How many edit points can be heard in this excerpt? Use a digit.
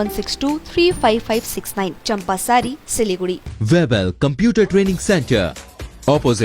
1